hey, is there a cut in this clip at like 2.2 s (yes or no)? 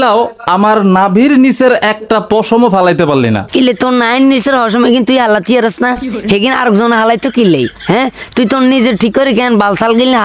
no